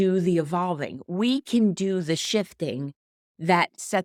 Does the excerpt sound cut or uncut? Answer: uncut